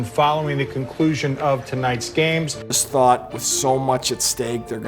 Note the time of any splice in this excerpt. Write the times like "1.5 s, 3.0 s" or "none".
2.7 s